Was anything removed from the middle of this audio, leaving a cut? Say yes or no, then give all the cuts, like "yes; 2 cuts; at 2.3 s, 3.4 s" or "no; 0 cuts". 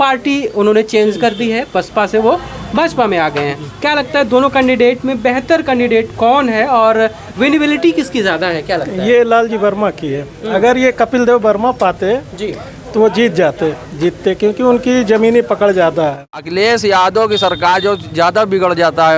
yes; 1 cut; at 16.3 s